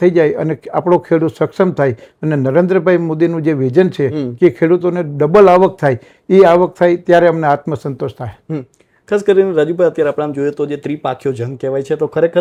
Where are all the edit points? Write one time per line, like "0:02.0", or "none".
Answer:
none